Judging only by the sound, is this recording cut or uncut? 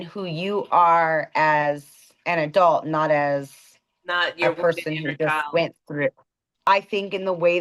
cut